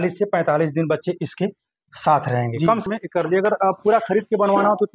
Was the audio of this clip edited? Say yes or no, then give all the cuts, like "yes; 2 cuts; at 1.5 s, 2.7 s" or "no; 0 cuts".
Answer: yes; 1 cut; at 2.9 s